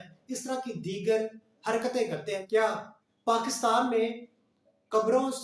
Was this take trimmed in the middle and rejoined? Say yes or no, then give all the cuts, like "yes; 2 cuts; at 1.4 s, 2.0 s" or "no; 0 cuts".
yes; 1 cut; at 2.4 s